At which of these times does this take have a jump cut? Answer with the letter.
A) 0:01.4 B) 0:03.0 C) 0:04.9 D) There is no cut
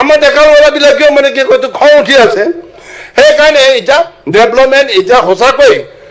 D